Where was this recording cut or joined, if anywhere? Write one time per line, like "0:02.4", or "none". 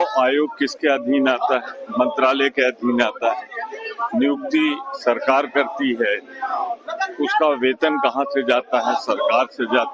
0:04.9